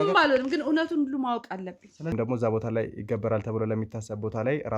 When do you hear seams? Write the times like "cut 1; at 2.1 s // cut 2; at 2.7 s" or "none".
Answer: cut 1; at 2.1 s